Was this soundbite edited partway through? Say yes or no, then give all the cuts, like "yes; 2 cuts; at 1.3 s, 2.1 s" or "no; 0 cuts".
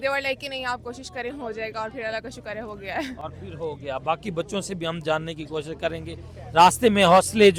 no; 0 cuts